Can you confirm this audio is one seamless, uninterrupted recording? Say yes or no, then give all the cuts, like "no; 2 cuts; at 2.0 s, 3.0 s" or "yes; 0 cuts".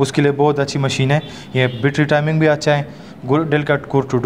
yes; 0 cuts